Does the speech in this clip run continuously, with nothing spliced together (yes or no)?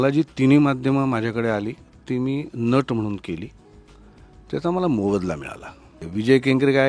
no